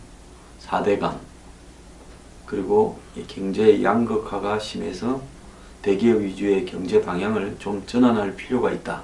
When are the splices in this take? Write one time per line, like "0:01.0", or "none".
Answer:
none